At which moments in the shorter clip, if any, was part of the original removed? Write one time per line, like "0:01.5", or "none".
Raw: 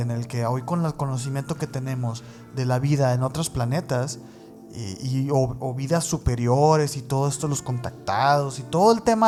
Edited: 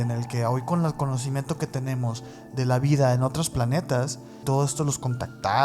0:04.4